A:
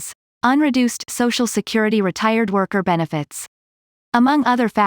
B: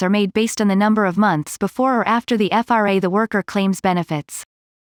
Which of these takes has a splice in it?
A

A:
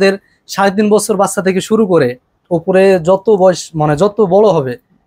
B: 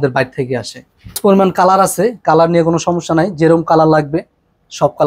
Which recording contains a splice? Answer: B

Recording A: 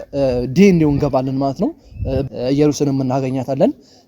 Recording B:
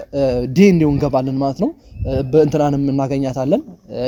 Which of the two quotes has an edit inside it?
A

